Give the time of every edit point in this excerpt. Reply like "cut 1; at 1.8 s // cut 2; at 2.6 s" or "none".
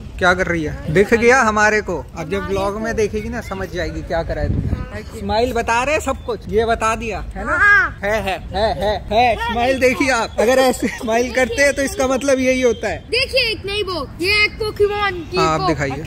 none